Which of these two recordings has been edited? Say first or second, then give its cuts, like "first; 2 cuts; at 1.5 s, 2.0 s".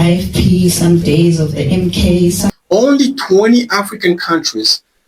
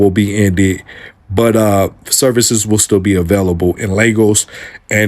first; 1 cut; at 2.5 s